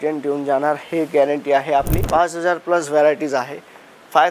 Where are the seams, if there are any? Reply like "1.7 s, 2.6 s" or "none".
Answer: 2.0 s